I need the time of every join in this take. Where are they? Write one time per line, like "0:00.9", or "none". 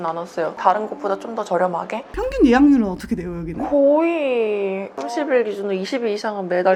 none